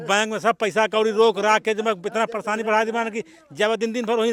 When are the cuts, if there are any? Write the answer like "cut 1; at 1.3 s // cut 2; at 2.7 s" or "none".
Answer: none